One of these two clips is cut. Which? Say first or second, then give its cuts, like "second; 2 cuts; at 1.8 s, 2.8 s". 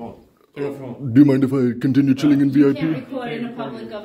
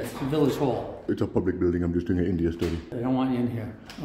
second; 2 cuts; at 1.1 s, 2.9 s